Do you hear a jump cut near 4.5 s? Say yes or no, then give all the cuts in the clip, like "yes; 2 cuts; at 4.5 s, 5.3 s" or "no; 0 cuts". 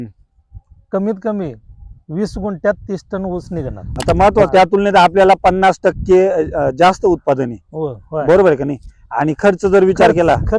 yes; 1 cut; at 4.5 s